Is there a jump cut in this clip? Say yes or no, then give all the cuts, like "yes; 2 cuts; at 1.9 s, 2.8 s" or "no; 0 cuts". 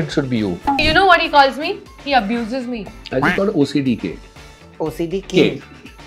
yes; 3 cuts; at 0.8 s, 1.9 s, 2.9 s